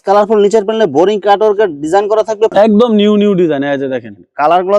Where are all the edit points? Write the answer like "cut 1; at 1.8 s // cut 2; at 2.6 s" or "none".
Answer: cut 1; at 2.5 s